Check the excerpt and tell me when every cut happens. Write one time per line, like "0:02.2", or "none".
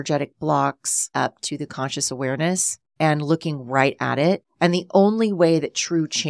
0:01.1
0:02.8
0:04.5